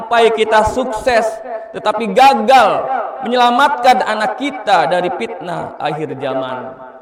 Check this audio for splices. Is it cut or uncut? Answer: uncut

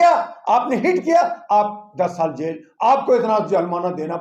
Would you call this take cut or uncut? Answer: uncut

